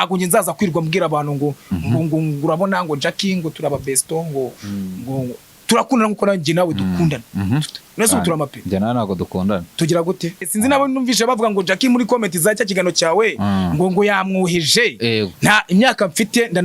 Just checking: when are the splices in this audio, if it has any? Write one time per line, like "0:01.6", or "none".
0:05.5
0:10.5